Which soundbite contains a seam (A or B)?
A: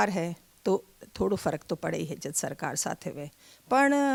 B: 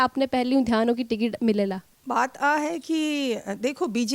B